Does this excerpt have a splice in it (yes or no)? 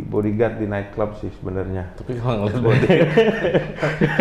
no